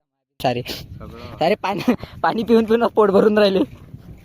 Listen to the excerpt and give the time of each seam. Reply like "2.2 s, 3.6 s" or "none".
none